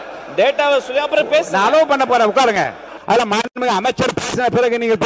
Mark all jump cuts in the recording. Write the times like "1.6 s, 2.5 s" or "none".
2.9 s